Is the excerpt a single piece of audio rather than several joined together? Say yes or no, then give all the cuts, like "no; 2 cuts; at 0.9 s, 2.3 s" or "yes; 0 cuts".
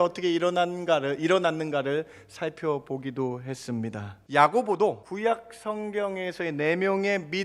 no; 2 cuts; at 4.1 s, 5.1 s